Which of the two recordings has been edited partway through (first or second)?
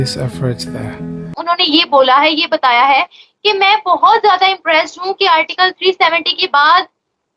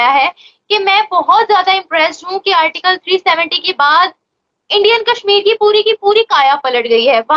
first